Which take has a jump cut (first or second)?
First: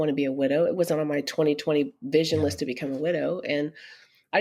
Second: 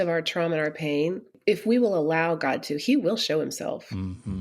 second